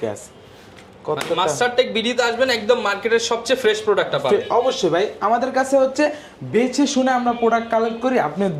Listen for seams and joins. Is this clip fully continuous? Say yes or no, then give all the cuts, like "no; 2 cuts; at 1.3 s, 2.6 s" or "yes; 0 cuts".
yes; 0 cuts